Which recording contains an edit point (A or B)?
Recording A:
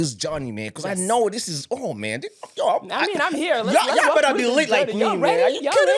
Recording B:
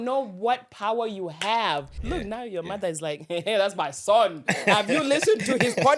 B